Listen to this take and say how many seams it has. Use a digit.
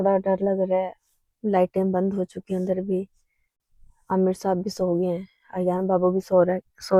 0